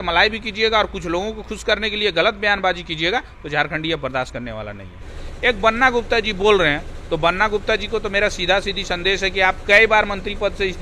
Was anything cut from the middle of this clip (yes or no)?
yes